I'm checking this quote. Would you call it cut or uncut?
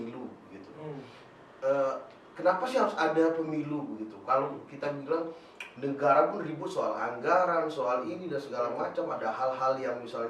uncut